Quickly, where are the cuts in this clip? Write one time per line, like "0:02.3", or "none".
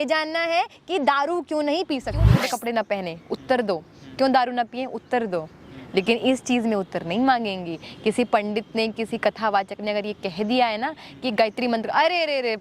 0:02.4